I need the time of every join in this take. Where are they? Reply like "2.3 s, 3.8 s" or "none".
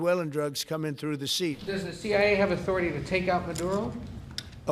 1.6 s